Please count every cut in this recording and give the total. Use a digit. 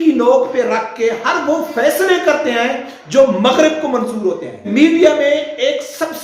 1